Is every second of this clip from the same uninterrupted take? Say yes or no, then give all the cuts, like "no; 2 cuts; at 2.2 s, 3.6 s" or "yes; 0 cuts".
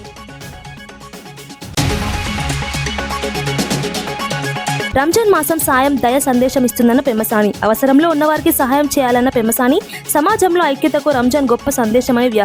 yes; 0 cuts